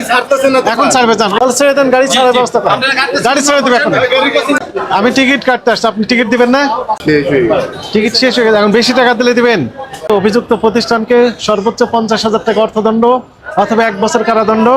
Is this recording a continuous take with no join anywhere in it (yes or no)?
no